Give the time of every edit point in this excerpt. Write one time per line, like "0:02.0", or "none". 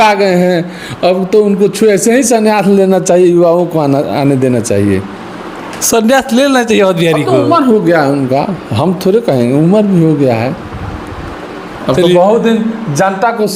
none